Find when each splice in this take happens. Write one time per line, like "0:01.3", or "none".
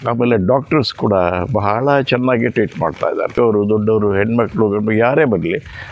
0:03.3